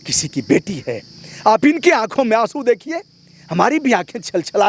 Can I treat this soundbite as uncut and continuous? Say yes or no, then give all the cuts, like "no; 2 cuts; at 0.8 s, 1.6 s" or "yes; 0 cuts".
yes; 0 cuts